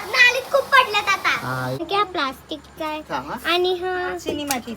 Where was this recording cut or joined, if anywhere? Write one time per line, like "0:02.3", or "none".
0:01.8